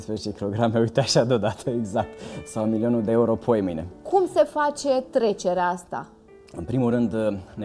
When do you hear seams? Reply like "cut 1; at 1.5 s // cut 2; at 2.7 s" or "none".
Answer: none